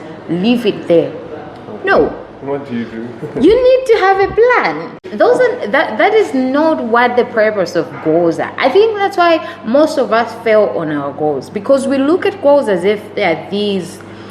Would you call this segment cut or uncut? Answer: cut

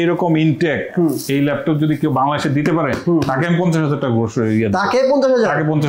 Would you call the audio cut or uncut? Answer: uncut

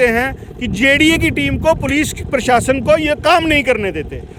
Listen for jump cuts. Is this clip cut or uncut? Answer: uncut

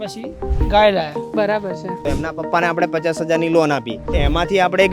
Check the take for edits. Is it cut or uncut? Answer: cut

